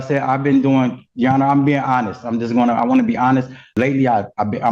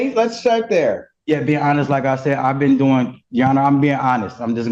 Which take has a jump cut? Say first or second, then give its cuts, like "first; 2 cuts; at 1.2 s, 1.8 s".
first; 1 cut; at 3.7 s